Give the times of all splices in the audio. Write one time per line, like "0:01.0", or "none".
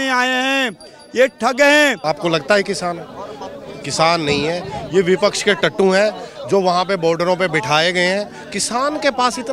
0:02.0